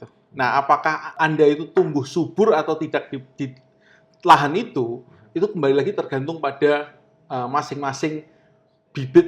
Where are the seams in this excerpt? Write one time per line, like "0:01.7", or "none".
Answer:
0:01.1